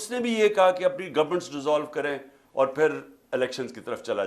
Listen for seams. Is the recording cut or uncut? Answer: uncut